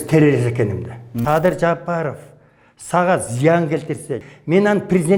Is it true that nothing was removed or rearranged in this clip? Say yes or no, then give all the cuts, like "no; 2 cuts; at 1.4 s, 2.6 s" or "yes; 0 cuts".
no; 2 cuts; at 1.2 s, 4.2 s